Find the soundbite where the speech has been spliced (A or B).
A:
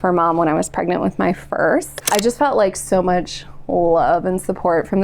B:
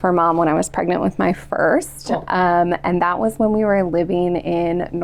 A